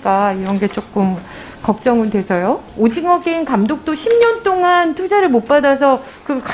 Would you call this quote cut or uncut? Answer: cut